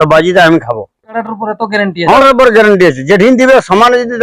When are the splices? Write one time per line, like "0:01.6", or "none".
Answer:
0:01.1
0:02.2